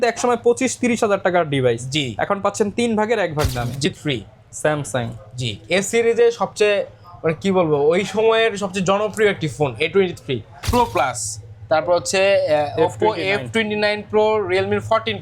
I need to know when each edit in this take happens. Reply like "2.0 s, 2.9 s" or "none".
3.8 s, 10.6 s